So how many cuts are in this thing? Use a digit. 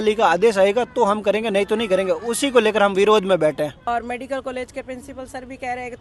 1